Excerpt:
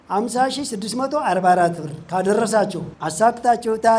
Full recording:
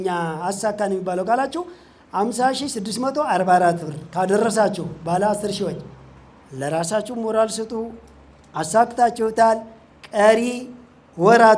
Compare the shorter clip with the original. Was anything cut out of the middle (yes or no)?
yes